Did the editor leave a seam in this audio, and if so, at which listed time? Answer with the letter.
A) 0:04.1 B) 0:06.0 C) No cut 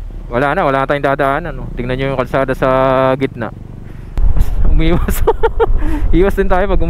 A